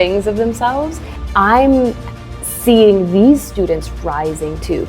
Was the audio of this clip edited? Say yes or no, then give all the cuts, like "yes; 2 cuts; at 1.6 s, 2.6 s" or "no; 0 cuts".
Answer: yes; 1 cut; at 1.1 s